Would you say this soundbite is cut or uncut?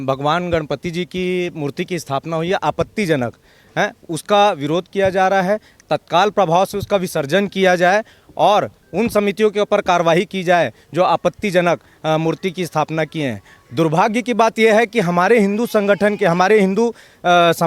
uncut